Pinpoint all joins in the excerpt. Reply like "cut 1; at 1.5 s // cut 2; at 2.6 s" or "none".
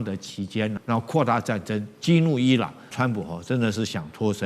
cut 1; at 0.8 s // cut 2; at 2.9 s

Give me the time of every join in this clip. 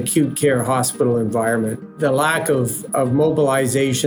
cut 1; at 1.9 s

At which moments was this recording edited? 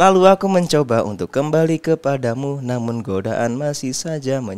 none

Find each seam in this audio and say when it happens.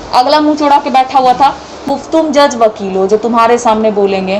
cut 1; at 1.8 s

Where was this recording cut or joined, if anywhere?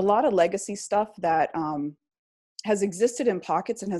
none

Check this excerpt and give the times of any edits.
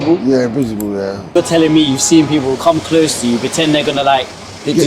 cut 1; at 1.4 s

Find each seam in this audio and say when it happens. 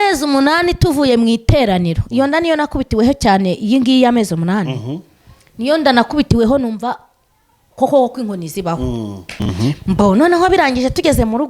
cut 1; at 9.5 s

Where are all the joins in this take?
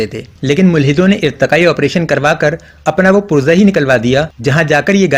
none

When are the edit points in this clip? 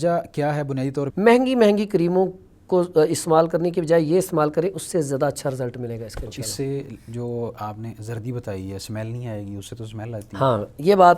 cut 1; at 1.0 s

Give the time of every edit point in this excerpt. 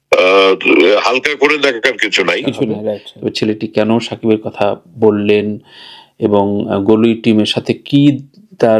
cut 1; at 3.1 s

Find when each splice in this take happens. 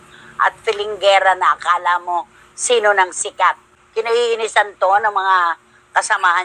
cut 1; at 3.7 s

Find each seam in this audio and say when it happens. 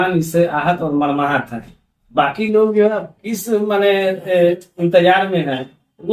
none

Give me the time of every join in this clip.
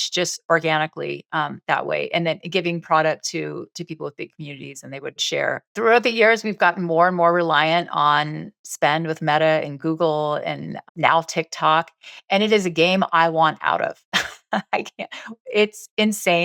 cut 1; at 5.7 s

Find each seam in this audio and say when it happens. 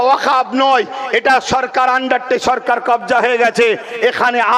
none

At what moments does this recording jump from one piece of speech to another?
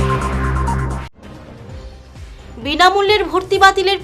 cut 1; at 0.9 s // cut 2; at 2.0 s

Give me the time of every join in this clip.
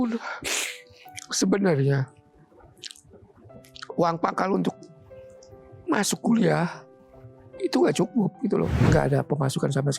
cut 1; at 8.8 s

